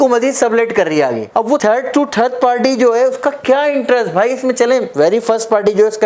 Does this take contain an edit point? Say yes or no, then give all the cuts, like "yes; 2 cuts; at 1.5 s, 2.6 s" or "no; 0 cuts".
no; 0 cuts